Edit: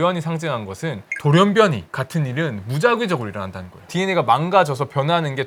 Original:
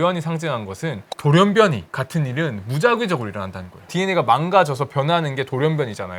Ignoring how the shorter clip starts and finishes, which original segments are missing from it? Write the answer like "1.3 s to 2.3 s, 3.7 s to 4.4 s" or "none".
none